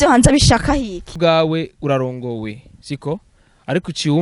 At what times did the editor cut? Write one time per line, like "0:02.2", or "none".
0:01.1